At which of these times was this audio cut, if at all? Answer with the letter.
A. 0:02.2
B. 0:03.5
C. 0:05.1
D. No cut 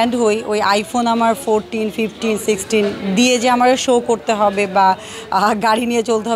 D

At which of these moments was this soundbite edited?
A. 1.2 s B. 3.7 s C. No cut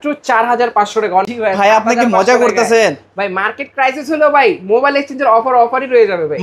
A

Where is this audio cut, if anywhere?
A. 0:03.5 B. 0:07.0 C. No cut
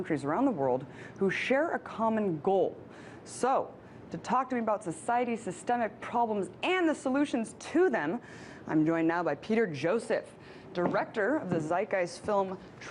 B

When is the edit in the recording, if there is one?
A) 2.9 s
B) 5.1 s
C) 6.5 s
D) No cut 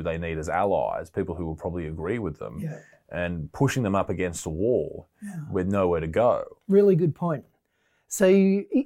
C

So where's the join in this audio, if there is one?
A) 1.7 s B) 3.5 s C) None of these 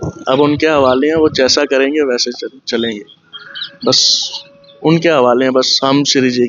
C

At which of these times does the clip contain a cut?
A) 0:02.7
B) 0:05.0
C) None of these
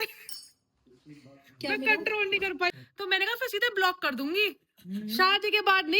A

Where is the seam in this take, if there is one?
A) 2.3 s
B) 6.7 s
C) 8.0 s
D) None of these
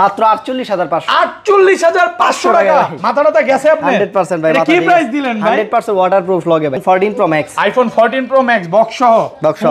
B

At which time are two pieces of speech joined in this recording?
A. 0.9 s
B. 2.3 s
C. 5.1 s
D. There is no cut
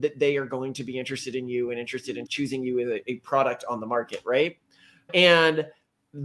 B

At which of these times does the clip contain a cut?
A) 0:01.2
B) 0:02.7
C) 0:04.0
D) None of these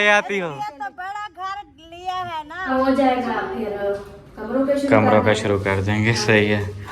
B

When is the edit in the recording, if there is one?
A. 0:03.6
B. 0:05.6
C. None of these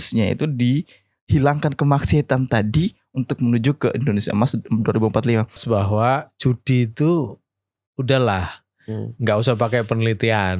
B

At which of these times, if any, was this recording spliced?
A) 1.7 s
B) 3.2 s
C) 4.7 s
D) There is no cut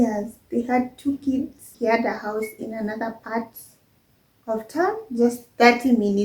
A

